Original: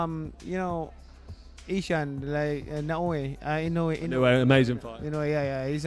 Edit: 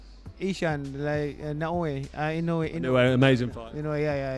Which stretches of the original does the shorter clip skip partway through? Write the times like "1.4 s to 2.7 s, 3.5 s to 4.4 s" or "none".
none